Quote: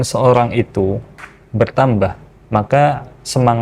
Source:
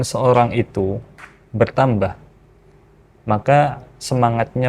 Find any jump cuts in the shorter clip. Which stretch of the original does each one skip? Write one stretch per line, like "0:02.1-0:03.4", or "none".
0:02.3-0:03.1